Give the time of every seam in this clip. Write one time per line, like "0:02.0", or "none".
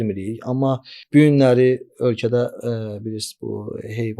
0:00.9